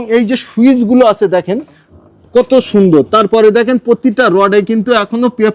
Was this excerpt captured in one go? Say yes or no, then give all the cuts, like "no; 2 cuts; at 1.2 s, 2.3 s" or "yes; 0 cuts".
yes; 0 cuts